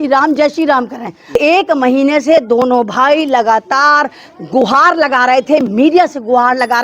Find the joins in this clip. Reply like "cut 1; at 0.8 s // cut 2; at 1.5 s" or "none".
cut 1; at 1.3 s